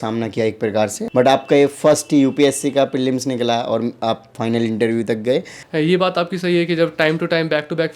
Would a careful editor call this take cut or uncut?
cut